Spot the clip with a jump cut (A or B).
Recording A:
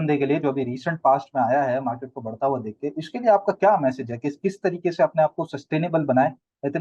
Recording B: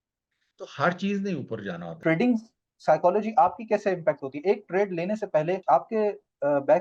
B